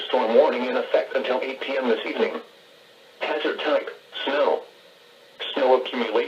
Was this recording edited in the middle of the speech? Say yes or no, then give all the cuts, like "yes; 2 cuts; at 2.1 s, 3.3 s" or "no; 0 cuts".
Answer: yes; 1 cut; at 1.1 s